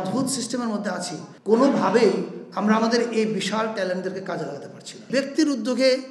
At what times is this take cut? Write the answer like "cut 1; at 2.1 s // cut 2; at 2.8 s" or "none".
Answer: cut 1; at 5.1 s